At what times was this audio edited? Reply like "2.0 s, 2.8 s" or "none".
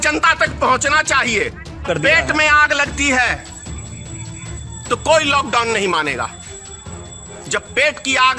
1.8 s